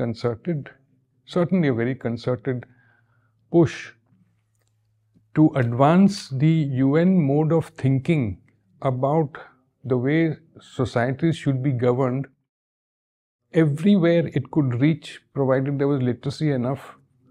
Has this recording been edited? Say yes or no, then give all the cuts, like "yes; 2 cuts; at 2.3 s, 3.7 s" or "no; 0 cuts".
no; 0 cuts